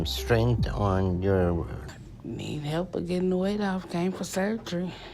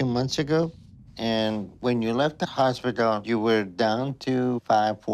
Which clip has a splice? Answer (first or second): first